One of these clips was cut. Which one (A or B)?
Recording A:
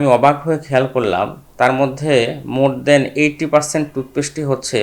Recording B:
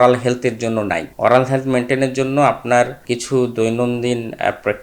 B